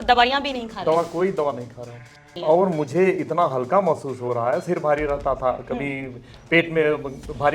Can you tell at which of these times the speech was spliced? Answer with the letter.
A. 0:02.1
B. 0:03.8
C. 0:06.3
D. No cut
A